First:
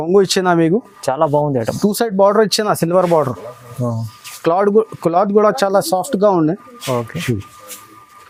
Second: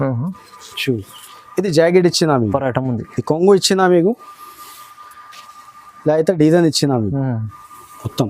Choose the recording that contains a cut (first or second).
second